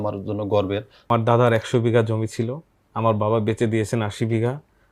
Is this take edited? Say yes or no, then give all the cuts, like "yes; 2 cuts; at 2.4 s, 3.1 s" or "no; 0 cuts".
yes; 1 cut; at 1.0 s